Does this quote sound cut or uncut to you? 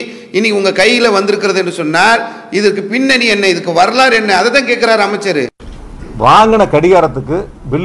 uncut